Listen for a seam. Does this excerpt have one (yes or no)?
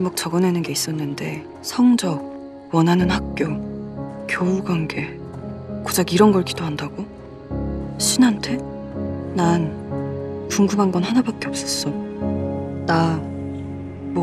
no